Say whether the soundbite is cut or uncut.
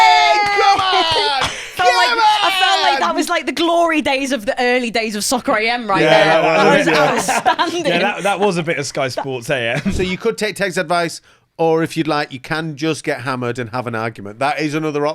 cut